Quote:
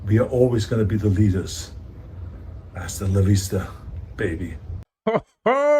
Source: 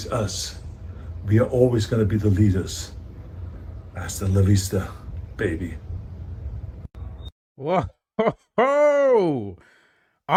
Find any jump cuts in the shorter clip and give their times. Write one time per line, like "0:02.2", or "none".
0:04.9